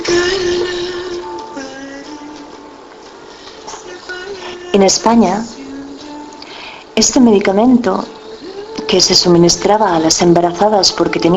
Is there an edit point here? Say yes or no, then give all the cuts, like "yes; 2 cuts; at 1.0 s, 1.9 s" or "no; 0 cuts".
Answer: yes; 1 cut; at 2.7 s